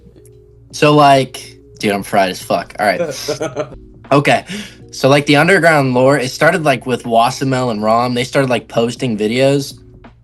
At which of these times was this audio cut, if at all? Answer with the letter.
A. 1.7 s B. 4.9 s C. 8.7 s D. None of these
D